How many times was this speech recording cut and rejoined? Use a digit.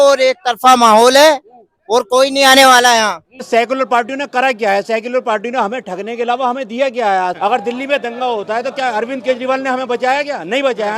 2